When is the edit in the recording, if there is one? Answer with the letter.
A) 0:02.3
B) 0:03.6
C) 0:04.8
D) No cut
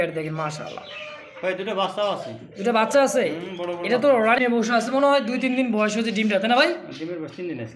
C